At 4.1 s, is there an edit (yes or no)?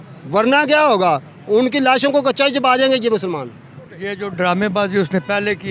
yes